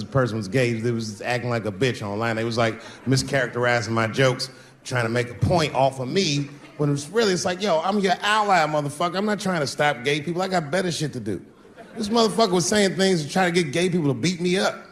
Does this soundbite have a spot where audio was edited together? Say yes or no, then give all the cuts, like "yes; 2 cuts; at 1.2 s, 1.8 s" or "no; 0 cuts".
no; 0 cuts